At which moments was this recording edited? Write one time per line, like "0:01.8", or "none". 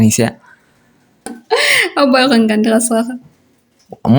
0:01.3